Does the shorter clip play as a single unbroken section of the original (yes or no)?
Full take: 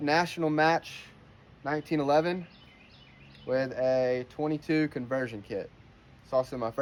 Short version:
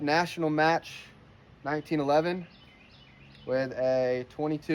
yes